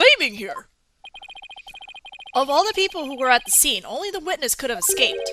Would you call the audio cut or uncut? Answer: cut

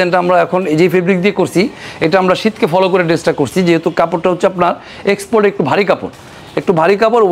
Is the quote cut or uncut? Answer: uncut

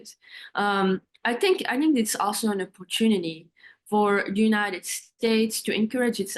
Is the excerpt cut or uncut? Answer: uncut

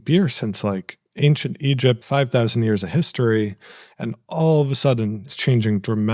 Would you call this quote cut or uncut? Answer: cut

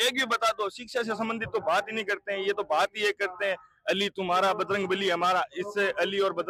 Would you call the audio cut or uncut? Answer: uncut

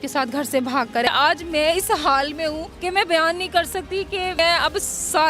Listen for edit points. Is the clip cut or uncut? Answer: cut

